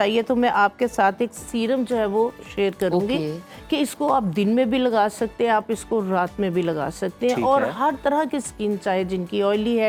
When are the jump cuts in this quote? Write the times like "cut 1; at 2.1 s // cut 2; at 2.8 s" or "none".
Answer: none